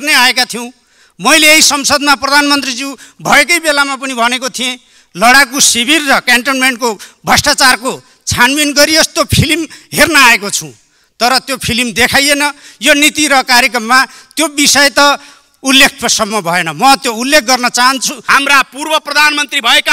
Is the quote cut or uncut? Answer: cut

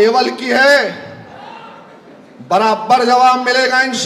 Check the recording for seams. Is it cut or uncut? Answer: uncut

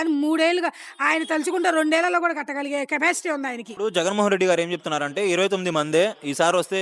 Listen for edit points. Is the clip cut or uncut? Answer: cut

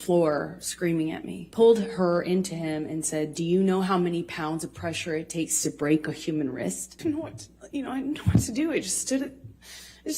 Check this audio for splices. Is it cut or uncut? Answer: cut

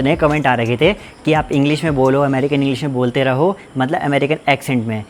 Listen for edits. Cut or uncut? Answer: uncut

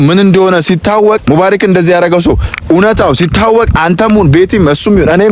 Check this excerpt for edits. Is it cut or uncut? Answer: cut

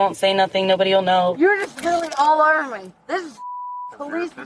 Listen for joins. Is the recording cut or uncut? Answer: cut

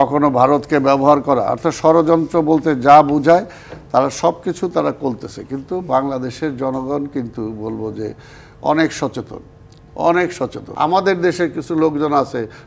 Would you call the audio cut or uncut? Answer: cut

